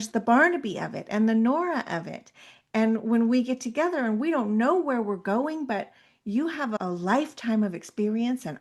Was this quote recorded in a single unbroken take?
yes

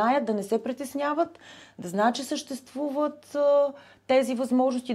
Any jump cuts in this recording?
no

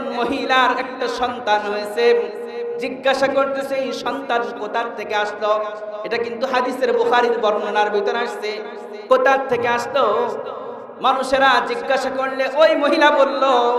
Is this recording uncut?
yes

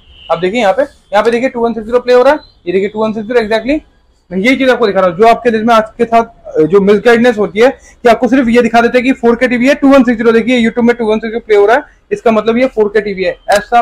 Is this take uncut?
yes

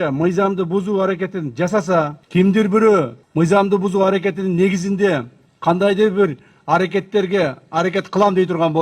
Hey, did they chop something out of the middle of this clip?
yes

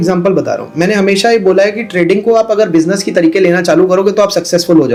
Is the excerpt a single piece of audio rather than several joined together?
yes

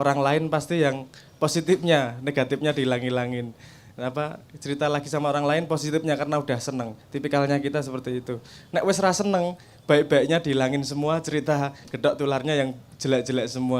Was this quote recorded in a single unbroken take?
yes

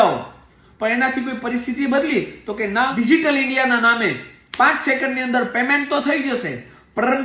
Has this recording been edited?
yes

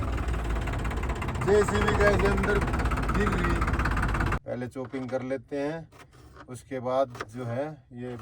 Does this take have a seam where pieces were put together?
yes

